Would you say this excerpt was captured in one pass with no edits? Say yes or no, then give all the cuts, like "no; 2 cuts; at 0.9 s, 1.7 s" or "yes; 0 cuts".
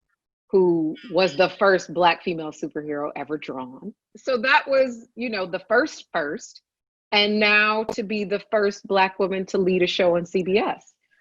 no; 1 cut; at 4.1 s